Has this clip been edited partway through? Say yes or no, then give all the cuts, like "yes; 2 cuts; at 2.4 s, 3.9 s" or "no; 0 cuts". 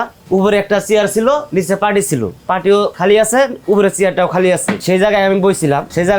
yes; 3 cuts; at 1.5 s, 2.9 s, 4.7 s